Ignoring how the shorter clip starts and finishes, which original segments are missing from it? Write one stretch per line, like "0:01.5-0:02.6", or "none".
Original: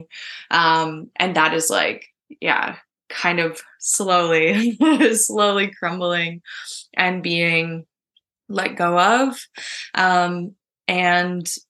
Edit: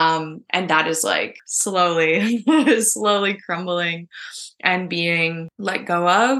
0:02.1-0:03.8
0:07.8-0:08.4